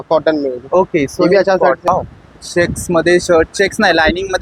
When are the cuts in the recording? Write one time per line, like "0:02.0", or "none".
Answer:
0:01.9